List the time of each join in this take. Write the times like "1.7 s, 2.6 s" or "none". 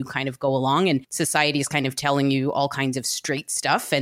1.1 s

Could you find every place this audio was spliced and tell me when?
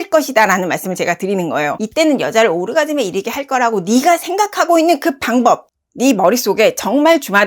1.8 s

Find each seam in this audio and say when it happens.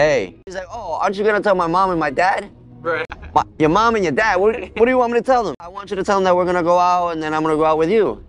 0.9 s, 3.1 s, 5.8 s

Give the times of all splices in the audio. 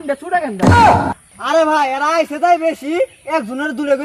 none

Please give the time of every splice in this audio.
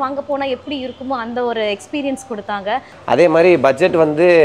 2.9 s

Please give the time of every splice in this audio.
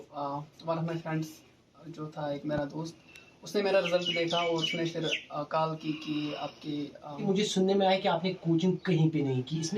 7.2 s

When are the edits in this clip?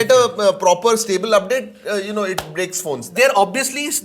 3.0 s

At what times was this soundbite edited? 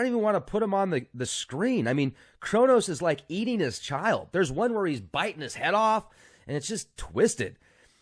none

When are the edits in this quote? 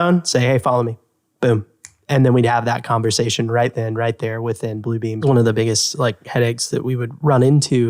5.2 s

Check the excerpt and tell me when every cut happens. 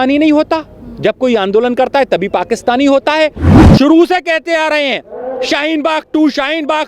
3.5 s

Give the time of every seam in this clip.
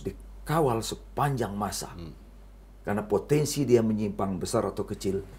none

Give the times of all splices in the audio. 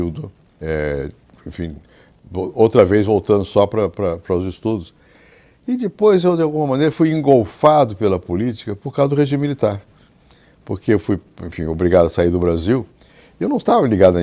5.1 s

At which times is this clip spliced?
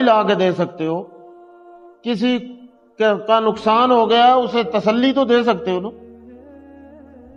none

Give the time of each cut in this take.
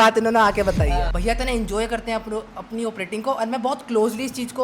1.1 s

